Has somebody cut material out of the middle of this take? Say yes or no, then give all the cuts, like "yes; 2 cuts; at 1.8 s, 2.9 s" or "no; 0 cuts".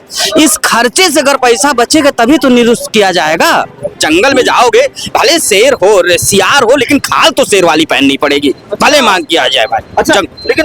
yes; 1 cut; at 4.0 s